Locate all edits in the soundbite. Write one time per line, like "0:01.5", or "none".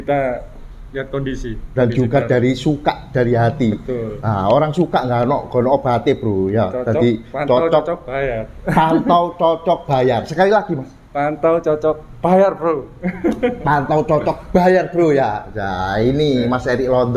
none